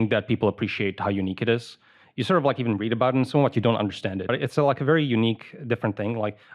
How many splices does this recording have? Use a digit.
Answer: 1